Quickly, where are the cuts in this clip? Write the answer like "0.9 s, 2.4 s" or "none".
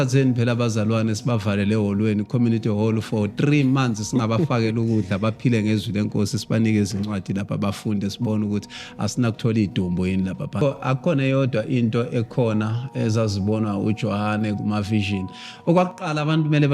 10.6 s